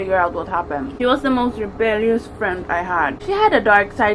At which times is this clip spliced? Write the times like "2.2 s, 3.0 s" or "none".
0.9 s, 3.2 s